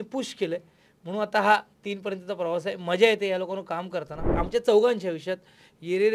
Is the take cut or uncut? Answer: cut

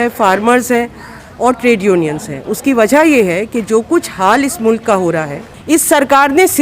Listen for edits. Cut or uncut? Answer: cut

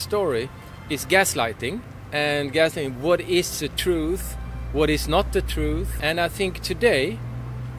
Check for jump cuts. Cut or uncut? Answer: cut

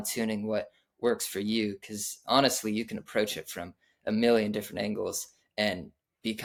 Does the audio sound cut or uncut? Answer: uncut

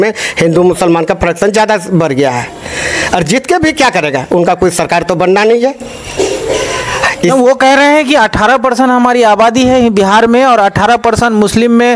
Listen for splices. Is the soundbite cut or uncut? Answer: uncut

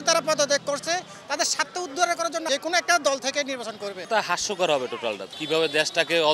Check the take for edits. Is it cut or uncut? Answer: cut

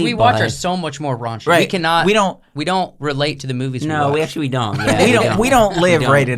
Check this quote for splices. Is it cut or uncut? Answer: uncut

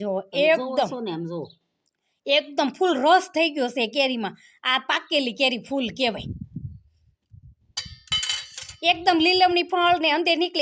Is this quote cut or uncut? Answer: uncut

